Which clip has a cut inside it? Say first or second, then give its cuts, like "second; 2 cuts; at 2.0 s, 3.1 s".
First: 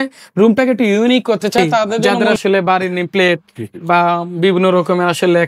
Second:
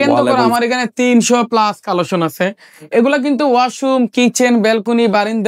first; 1 cut; at 2.2 s